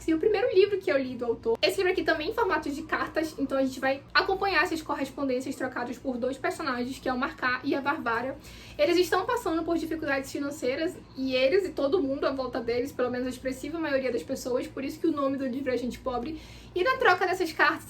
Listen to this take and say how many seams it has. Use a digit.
0